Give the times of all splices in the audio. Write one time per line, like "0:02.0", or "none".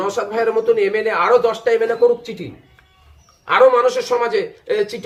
none